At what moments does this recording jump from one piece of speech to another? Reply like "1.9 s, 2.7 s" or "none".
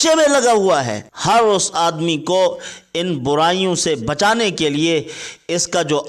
1.0 s